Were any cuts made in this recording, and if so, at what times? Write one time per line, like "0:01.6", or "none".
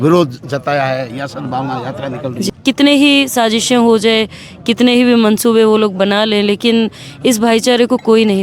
0:02.5